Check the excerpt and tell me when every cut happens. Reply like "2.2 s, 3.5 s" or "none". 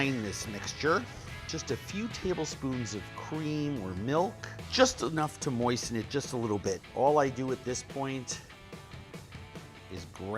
1.5 s